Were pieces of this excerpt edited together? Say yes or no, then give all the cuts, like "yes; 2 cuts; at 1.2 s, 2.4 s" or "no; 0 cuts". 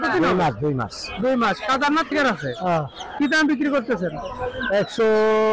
yes; 1 cut; at 2.1 s